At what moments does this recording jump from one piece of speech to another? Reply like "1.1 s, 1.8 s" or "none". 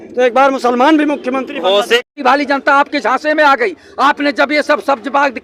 2.1 s